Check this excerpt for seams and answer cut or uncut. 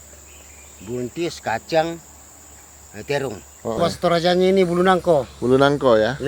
cut